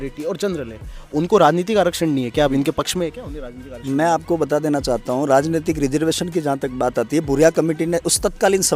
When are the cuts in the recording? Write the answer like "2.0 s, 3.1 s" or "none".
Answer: none